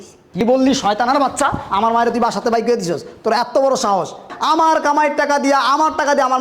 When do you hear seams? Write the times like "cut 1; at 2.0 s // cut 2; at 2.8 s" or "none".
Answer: cut 1; at 4.3 s